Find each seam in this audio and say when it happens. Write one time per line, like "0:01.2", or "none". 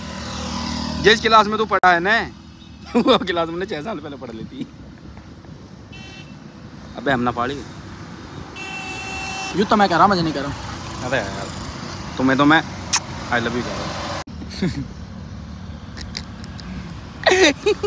none